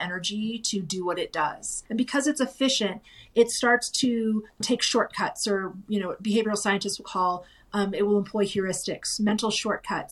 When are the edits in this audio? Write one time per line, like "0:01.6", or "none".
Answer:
0:01.7